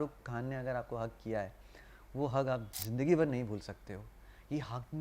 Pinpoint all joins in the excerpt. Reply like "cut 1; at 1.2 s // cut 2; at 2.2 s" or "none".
cut 1; at 2.8 s